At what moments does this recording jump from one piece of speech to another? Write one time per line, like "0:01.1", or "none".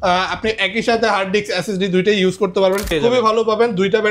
0:02.9

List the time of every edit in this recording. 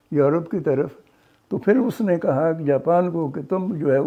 none

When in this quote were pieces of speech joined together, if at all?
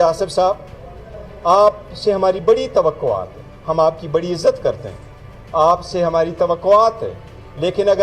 none

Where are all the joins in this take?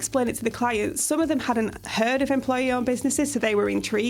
none

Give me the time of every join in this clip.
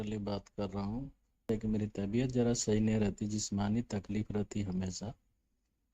0:01.4

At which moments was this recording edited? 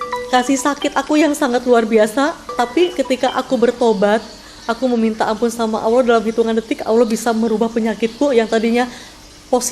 0:02.7

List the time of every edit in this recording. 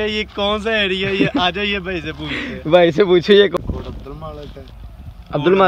0:03.6

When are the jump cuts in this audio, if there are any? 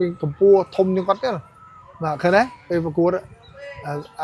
none

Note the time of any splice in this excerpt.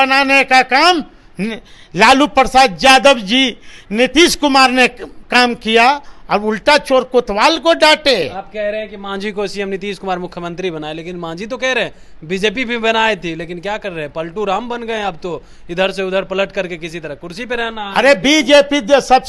none

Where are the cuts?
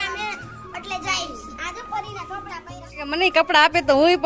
0:03.1

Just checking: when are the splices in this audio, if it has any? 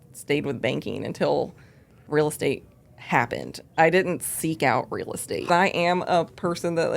0:05.5

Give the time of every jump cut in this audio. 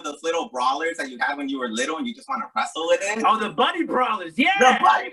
none

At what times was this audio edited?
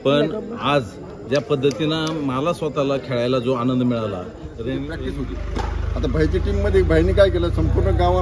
0:05.0

